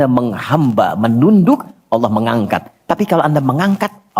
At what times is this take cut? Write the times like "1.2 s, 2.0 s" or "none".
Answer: none